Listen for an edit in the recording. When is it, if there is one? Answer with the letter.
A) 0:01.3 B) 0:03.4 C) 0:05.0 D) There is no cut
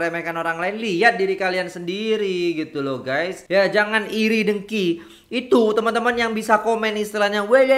B